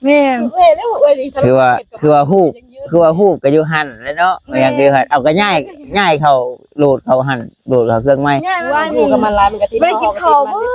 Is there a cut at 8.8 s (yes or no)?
yes